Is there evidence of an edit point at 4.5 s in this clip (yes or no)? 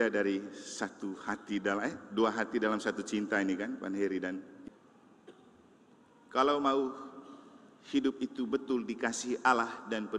yes